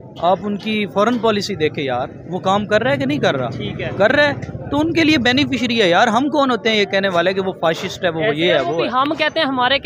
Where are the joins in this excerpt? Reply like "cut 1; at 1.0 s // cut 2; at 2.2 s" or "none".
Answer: none